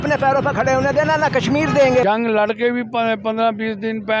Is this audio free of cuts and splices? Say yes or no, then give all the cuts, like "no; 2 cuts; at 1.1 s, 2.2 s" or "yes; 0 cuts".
no; 1 cut; at 2.0 s